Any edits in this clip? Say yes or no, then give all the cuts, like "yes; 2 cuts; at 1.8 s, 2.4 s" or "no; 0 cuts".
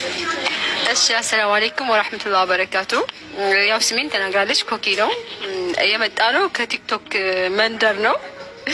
no; 0 cuts